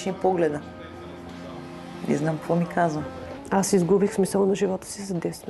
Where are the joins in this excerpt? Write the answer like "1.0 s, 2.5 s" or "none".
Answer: 3.3 s